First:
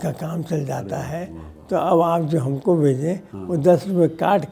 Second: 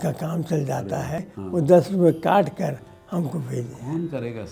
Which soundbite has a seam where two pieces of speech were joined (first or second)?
second